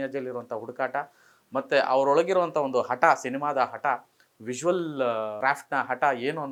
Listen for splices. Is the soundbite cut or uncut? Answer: uncut